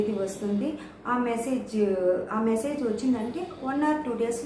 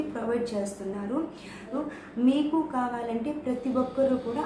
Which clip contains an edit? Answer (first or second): second